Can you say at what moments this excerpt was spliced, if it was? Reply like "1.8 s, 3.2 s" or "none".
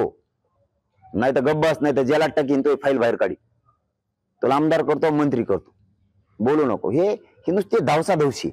none

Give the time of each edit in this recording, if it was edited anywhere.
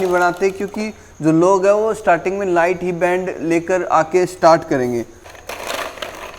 5.2 s

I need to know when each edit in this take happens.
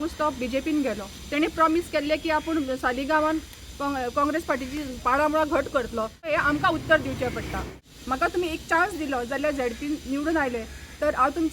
6.3 s, 7.8 s

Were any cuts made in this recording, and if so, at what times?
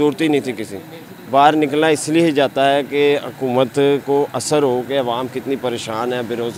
none

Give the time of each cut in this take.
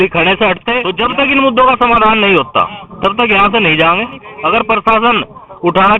0.9 s, 4.3 s

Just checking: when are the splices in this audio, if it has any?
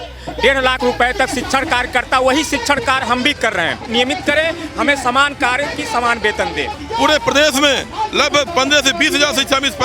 3.8 s, 6.8 s

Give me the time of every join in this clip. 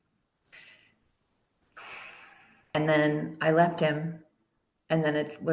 2.8 s

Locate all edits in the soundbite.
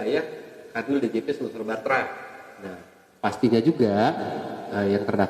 none

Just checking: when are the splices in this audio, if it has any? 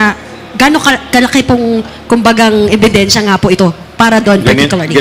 none

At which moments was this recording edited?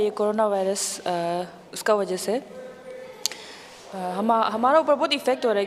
none

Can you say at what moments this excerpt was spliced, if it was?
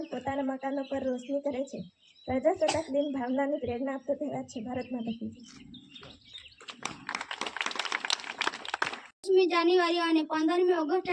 9.2 s

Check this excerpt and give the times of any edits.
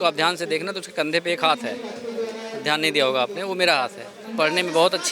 4.2 s

